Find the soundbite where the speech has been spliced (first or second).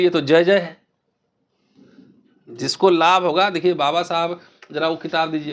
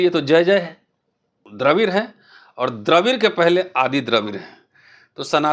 second